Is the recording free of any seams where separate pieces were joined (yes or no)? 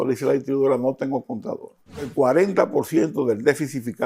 no